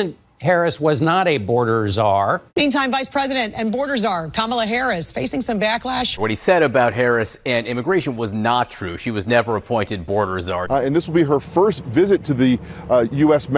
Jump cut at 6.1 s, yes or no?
yes